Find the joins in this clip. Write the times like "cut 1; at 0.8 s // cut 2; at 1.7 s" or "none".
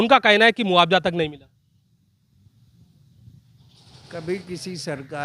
none